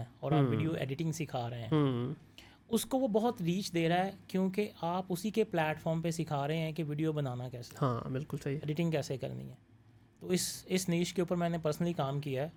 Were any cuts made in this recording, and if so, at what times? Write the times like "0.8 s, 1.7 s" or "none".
none